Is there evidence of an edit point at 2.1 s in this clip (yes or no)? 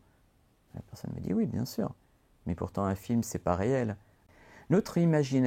no